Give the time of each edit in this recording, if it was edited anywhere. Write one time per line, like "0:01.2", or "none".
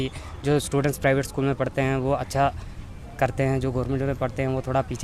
none